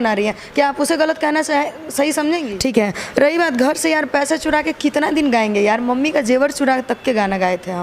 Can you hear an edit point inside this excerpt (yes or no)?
yes